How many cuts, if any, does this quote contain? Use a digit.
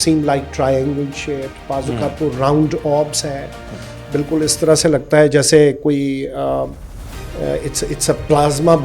0